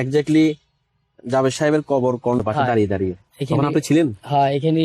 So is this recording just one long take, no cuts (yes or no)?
no